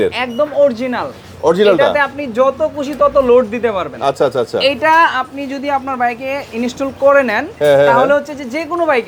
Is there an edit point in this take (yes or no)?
no